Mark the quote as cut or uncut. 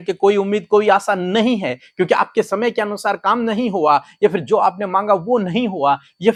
uncut